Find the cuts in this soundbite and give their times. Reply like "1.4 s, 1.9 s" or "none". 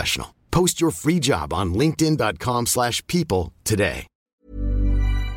4.1 s